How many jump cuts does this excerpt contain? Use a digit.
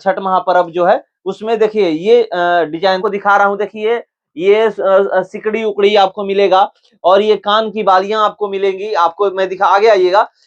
1